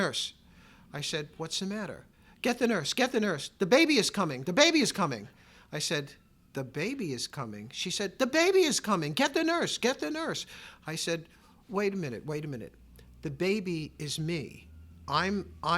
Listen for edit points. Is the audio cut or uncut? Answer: cut